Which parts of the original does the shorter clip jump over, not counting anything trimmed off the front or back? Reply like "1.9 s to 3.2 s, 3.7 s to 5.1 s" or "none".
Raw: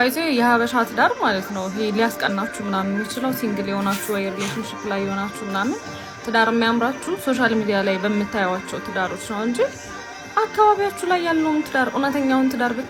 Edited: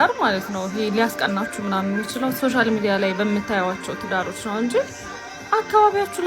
3.4 s to 7.2 s